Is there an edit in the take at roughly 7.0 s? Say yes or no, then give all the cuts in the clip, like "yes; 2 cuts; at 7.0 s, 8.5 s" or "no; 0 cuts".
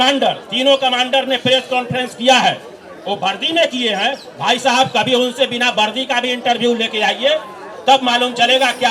no; 0 cuts